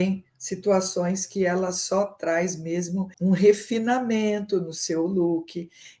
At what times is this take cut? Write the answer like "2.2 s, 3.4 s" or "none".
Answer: 3.1 s